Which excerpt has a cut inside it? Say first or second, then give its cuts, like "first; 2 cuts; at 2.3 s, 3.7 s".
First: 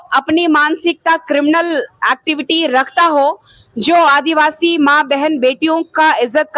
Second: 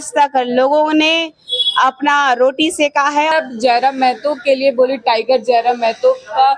second; 1 cut; at 3.3 s